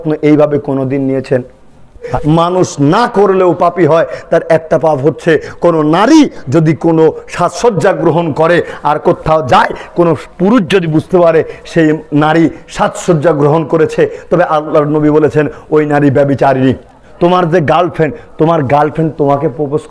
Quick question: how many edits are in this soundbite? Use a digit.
2